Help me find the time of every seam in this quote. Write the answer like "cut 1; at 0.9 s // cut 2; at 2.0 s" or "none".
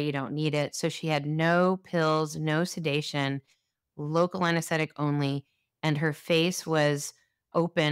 none